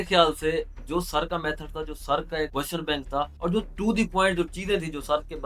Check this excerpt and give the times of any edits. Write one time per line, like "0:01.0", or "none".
0:02.5
0:03.3